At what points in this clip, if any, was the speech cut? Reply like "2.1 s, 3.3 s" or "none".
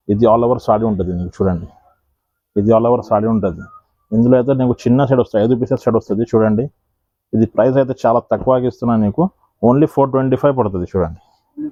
none